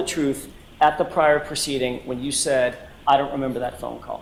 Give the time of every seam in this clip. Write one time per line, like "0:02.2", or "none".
none